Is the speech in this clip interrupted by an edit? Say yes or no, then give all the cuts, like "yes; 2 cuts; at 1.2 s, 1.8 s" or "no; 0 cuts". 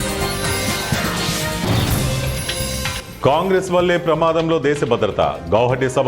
yes; 1 cut; at 3.0 s